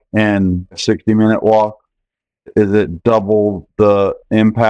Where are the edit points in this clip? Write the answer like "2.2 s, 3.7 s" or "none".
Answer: 0.8 s, 2.5 s